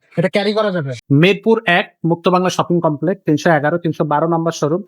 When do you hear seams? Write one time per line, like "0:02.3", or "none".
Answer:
0:00.9

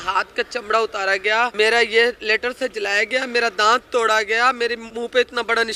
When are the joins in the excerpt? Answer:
0:01.5
0:04.9

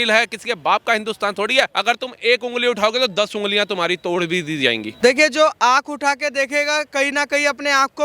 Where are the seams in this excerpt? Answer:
0:01.7
0:04.9

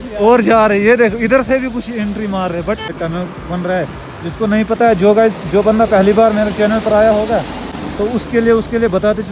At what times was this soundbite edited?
0:02.9

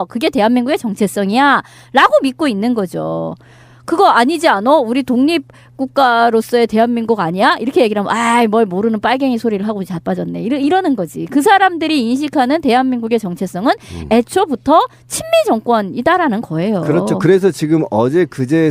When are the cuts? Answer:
0:14.3

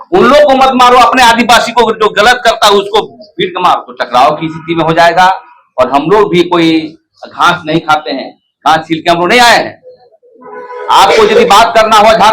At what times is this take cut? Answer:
0:03.9

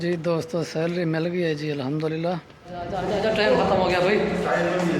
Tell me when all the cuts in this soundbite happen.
0:03.0

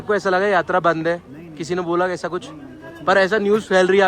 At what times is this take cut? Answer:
none

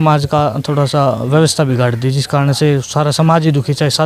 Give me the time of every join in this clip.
none

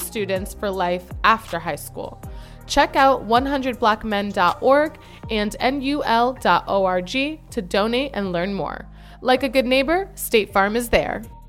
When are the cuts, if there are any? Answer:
none

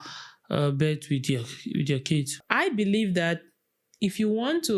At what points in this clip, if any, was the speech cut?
0:02.4

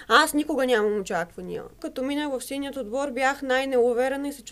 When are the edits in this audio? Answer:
0:01.8

